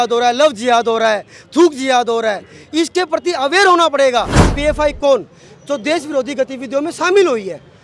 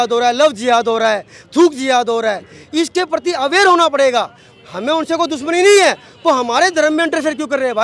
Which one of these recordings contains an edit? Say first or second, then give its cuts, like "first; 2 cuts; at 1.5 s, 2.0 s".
first; 1 cut; at 4.5 s